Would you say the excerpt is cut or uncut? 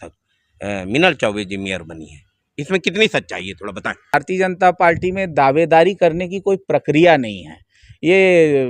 cut